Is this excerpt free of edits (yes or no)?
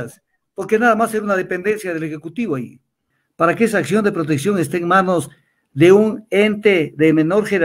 no